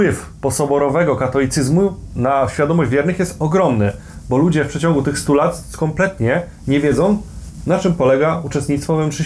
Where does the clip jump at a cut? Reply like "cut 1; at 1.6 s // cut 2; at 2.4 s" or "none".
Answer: none

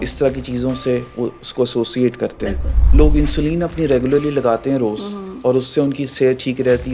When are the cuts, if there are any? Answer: cut 1; at 2.8 s

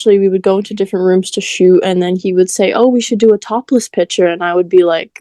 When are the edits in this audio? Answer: none

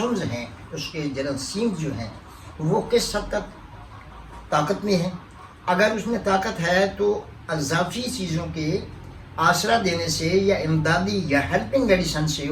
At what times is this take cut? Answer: none

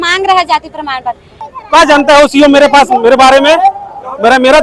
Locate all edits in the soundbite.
cut 1; at 1.5 s

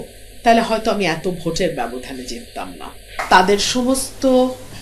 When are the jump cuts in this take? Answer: cut 1; at 3.1 s

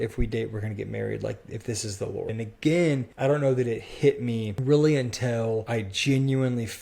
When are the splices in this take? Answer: cut 1; at 2.3 s // cut 2; at 3.1 s // cut 3; at 4.5 s // cut 4; at 5.7 s

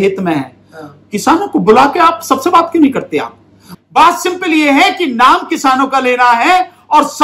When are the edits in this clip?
cut 1; at 3.7 s

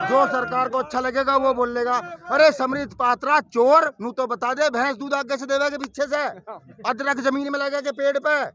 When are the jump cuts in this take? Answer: none

